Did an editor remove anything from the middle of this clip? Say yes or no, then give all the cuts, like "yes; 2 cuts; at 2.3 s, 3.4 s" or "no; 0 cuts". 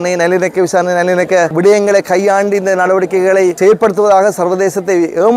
yes; 2 cuts; at 1.5 s, 3.6 s